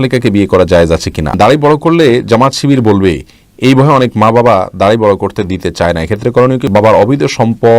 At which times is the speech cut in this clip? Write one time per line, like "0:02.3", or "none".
0:01.3
0:06.6